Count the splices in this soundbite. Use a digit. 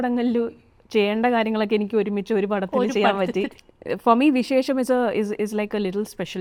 0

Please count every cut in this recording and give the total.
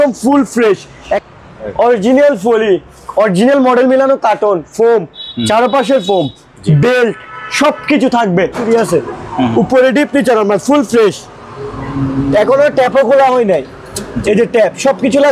2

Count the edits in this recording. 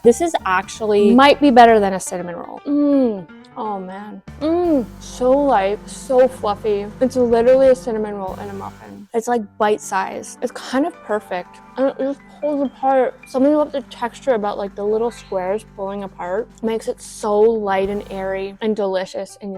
0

